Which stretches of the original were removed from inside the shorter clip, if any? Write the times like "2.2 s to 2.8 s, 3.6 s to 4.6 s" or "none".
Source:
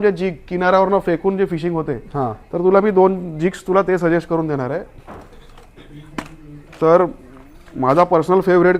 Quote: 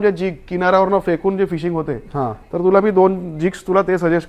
none